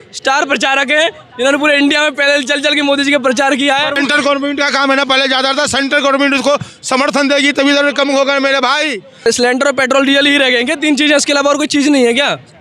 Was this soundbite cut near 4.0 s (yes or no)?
yes